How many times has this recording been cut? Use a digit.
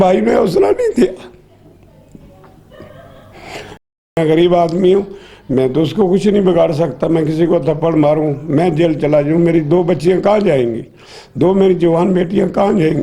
1